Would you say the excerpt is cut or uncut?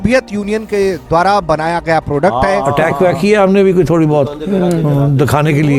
cut